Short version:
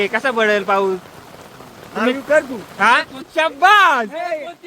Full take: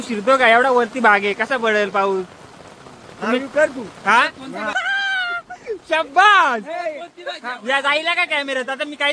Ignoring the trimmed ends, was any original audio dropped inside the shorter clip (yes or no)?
yes